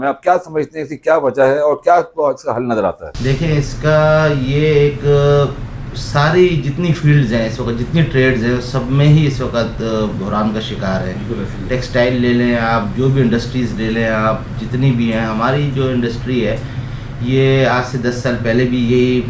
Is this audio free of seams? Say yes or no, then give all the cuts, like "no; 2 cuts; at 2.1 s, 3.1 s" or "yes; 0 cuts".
yes; 0 cuts